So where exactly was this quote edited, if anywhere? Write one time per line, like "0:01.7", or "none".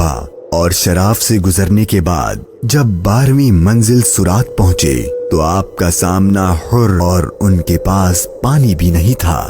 0:07.0